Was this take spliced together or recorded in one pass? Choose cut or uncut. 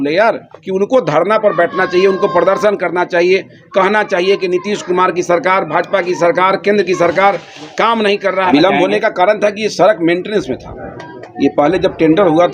cut